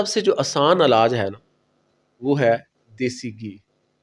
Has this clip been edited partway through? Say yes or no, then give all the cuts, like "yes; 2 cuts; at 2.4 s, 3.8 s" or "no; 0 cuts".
no; 0 cuts